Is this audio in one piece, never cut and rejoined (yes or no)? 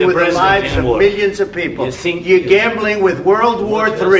yes